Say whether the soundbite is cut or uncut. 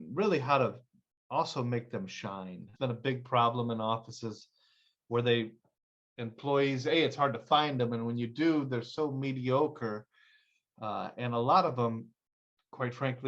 cut